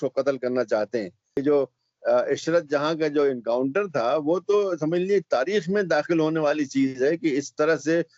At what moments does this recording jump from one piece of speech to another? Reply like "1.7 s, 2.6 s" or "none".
1.4 s

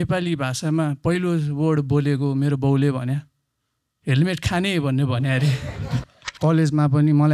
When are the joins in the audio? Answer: 6.2 s

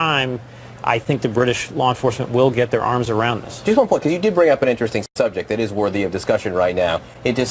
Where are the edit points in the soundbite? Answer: 5.3 s

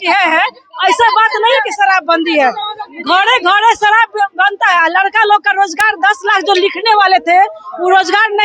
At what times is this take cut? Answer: none

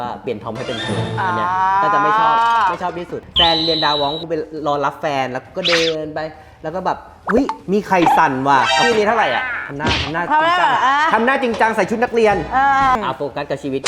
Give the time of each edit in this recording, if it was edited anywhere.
3.2 s, 8.9 s, 12.9 s

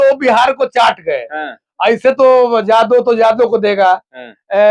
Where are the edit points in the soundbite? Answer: none

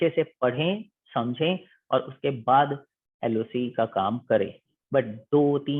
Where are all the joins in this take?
4.7 s

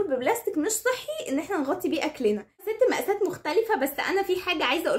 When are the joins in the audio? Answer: 2.7 s

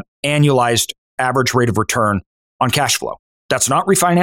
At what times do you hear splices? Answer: 2.4 s, 3.3 s

